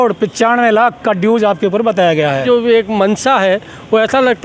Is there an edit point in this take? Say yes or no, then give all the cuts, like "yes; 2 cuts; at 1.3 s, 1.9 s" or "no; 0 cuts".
yes; 1 cut; at 2.4 s